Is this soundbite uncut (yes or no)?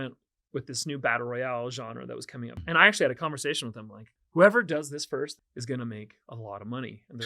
no